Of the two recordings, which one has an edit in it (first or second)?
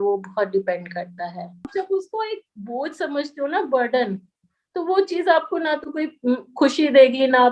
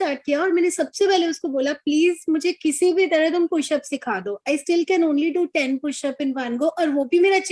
first